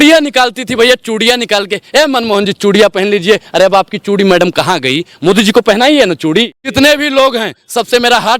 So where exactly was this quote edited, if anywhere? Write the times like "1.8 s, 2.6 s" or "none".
6.6 s